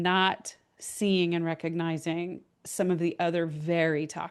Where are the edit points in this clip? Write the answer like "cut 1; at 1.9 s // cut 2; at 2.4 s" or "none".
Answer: none